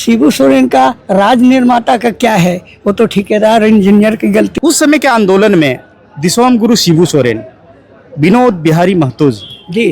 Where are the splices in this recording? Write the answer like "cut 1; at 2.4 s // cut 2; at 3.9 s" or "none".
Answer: cut 1; at 4.5 s